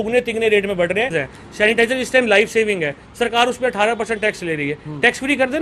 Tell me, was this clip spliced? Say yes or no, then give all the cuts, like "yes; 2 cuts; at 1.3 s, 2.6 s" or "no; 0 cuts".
yes; 1 cut; at 1.1 s